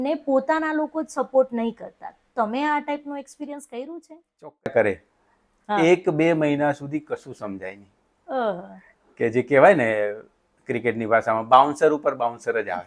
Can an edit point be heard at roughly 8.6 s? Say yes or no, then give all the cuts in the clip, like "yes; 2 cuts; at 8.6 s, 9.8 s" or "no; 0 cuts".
no; 1 cut; at 4.7 s